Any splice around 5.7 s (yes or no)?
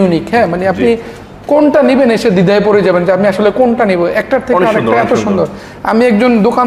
no